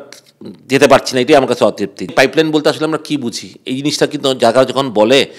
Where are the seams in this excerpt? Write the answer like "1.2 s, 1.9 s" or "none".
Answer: 2.1 s